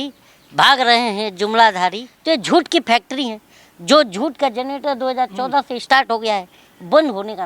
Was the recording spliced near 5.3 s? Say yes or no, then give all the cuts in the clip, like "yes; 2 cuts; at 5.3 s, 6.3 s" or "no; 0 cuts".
no; 1 cut; at 2.1 s